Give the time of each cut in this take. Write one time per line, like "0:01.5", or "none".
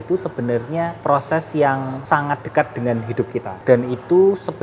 0:00.9
0:02.0
0:03.5